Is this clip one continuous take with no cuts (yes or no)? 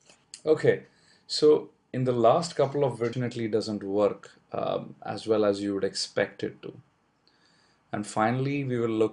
yes